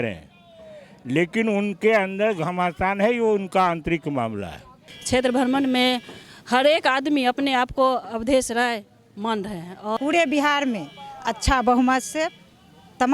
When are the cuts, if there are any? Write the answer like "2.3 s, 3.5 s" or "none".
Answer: 4.9 s, 10.0 s